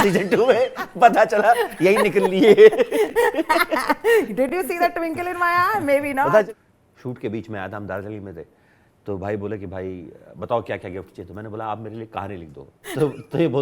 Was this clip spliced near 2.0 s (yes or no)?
no